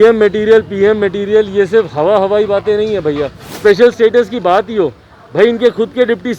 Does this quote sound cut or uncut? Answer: cut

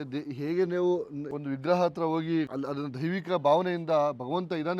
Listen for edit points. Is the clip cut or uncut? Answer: cut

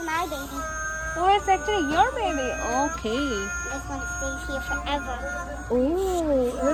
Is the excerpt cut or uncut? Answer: uncut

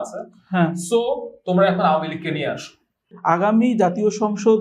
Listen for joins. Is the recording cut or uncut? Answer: cut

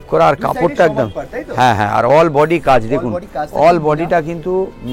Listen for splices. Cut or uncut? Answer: uncut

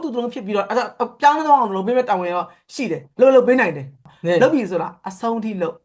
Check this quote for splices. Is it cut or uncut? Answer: cut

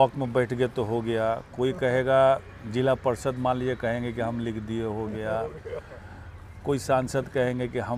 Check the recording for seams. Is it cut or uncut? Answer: uncut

